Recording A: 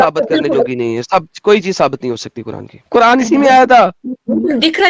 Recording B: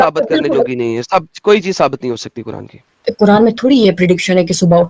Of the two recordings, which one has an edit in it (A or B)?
A